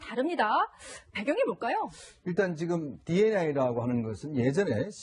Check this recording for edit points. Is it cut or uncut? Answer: cut